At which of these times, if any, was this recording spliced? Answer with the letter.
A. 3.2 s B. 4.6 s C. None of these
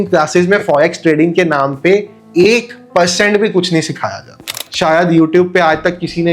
B